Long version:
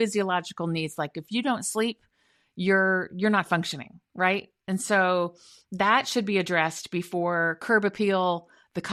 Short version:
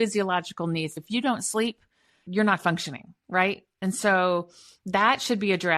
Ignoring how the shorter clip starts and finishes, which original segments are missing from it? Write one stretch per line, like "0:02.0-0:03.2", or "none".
0:00.9-0:01.1
0:02.4-0:03.1